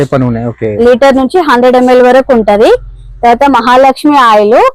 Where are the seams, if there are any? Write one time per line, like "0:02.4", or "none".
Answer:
none